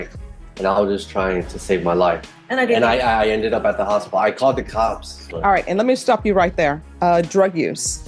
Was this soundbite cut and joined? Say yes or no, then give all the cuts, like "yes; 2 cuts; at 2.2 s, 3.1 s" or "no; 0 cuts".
yes; 3 cuts; at 2.3 s, 5.2 s, 6.9 s